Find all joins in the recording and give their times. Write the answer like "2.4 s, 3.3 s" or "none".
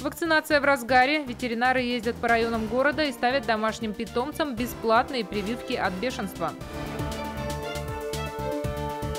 6.7 s